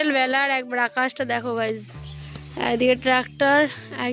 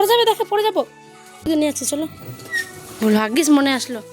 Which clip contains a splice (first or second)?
second